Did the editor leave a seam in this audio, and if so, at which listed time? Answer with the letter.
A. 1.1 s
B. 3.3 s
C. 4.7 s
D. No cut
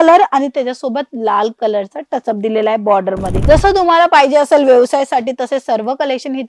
B